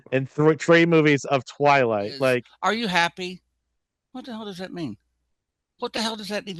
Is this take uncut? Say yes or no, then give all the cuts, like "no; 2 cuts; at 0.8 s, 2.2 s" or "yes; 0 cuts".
no; 1 cut; at 2.5 s